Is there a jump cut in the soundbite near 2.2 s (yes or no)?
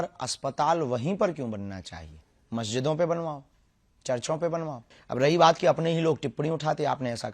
no